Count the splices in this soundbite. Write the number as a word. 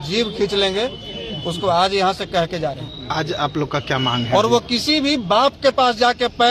zero